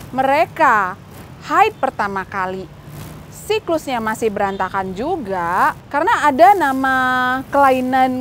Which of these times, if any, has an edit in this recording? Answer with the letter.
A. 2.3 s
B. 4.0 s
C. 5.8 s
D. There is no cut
C